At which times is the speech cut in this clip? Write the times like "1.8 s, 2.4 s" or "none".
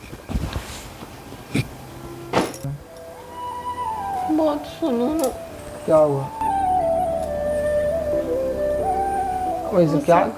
2.8 s